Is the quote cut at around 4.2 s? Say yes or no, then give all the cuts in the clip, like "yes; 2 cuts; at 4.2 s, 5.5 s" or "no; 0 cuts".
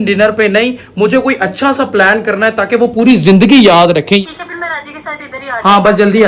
yes; 1 cut; at 4.2 s